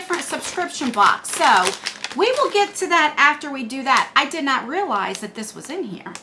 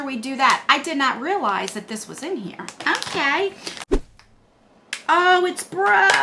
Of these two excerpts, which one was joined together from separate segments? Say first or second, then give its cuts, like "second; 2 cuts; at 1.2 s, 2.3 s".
second; 1 cut; at 3.9 s